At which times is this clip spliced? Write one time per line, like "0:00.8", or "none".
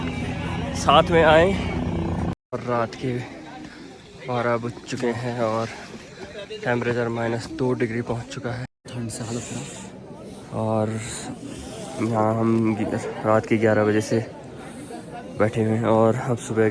0:02.5
0:08.8